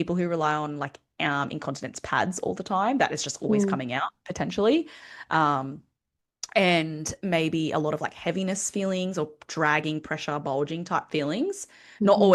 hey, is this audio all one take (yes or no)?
yes